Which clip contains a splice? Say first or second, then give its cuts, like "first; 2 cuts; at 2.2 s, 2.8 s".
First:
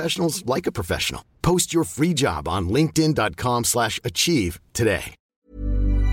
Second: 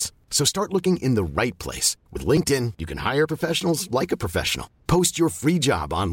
first; 1 cut; at 5.1 s